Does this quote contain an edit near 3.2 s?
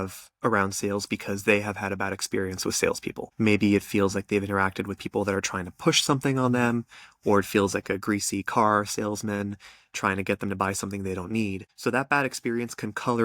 yes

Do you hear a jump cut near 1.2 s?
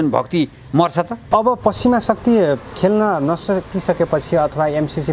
yes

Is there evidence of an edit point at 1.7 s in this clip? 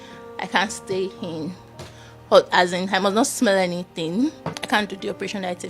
no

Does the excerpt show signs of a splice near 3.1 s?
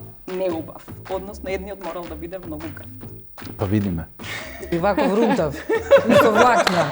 no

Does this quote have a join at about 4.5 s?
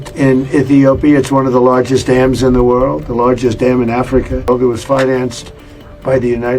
yes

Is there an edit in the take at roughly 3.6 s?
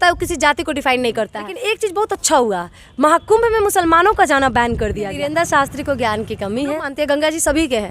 no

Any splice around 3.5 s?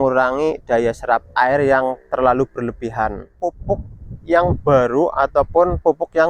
yes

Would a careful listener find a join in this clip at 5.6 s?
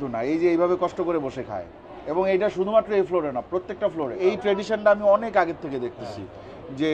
no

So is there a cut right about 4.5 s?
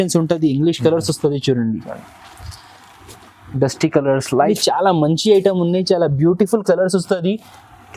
yes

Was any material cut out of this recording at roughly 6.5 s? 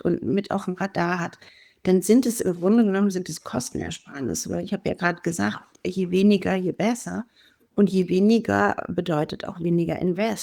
no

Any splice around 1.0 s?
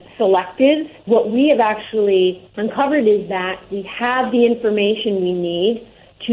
yes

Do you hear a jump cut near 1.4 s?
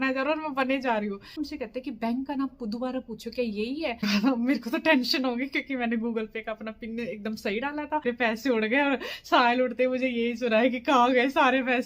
yes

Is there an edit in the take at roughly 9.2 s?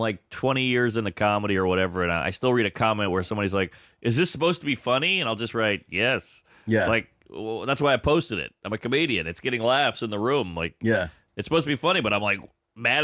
yes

